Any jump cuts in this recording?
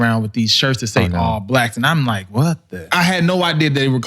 yes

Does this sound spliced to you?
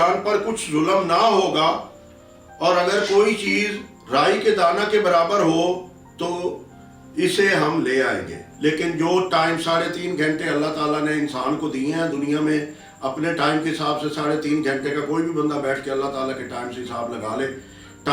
yes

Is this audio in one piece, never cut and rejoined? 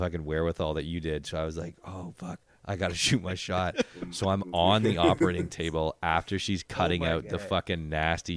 yes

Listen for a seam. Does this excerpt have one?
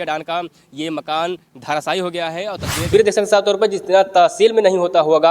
yes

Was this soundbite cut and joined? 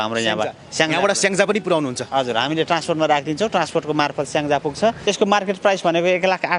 yes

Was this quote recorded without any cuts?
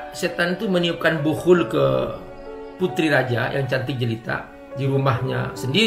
no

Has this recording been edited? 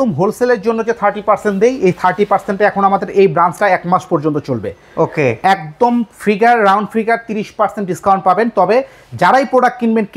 no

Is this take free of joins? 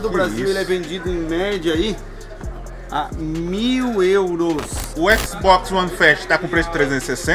no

